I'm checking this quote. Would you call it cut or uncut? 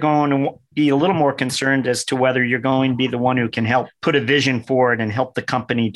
cut